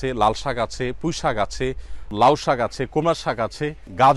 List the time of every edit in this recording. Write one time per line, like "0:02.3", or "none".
0:02.1